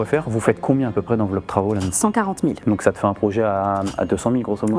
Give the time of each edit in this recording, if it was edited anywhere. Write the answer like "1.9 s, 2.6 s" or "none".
2.6 s